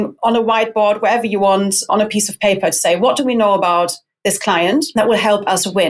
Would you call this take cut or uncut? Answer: cut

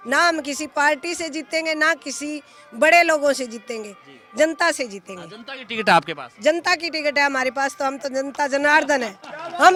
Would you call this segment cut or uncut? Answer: uncut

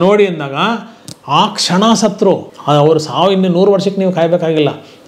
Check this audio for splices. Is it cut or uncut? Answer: cut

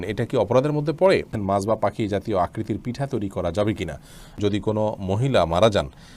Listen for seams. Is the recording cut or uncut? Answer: cut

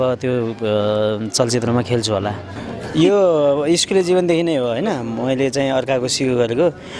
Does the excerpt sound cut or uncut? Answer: cut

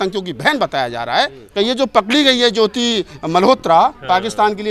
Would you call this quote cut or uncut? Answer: cut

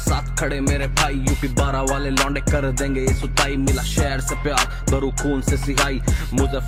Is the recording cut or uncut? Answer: uncut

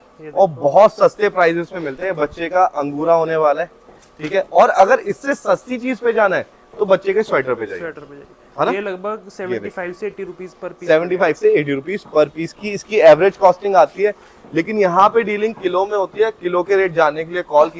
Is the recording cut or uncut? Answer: uncut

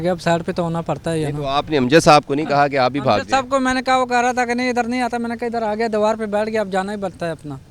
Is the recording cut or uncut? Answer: uncut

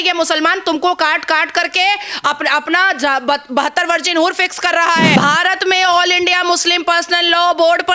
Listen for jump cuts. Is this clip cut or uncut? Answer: cut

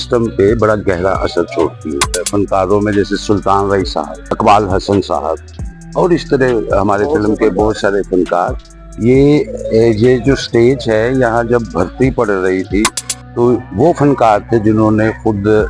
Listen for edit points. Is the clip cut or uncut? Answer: cut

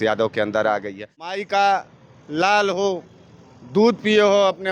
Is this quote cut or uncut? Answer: cut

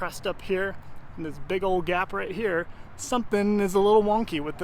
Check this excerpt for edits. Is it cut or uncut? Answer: uncut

